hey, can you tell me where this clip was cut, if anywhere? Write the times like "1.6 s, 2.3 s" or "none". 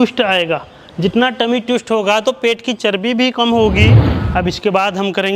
4.1 s